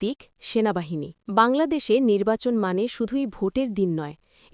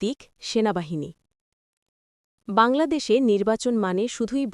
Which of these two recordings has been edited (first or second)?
first